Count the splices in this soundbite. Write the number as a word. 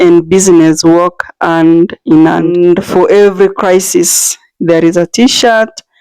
one